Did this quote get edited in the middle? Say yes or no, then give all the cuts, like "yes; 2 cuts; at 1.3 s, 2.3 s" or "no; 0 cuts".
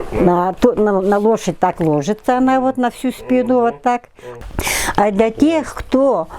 yes; 1 cut; at 4.5 s